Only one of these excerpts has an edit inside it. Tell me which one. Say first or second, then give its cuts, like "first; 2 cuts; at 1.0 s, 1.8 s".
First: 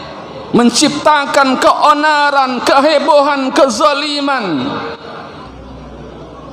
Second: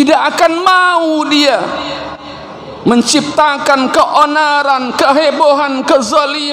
first; 1 cut; at 5.5 s